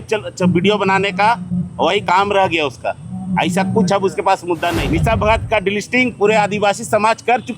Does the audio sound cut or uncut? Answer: cut